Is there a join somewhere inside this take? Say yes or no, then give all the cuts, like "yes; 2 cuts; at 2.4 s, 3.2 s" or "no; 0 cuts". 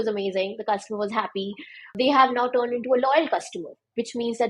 yes; 1 cut; at 1.9 s